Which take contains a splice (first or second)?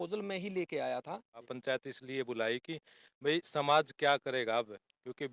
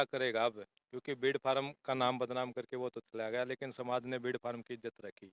first